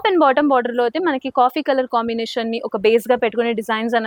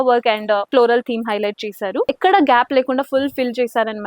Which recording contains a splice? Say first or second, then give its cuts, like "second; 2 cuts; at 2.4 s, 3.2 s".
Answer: second; 1 cut; at 2.1 s